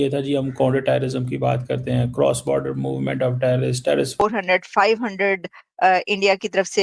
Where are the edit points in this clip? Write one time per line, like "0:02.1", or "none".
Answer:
0:04.2